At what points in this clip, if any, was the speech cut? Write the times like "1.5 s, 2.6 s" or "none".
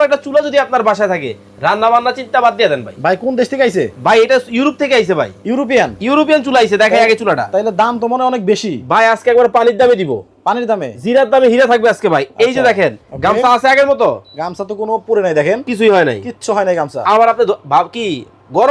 none